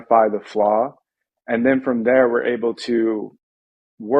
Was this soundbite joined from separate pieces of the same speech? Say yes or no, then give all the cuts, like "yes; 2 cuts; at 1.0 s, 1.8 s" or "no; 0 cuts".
no; 0 cuts